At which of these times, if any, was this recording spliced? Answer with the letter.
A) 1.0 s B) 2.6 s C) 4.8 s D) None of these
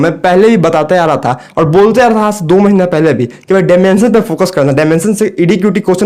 D